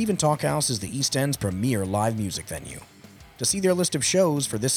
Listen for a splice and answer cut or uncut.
uncut